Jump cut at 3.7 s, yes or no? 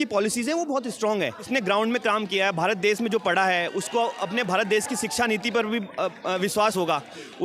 no